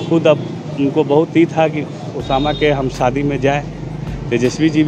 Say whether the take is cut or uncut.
uncut